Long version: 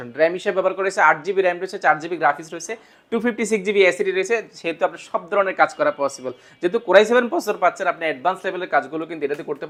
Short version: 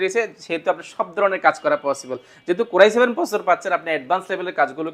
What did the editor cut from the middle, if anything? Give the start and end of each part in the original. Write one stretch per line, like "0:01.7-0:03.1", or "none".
none